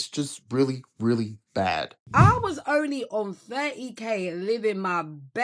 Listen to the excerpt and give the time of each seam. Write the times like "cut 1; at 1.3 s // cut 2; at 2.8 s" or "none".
cut 1; at 2.0 s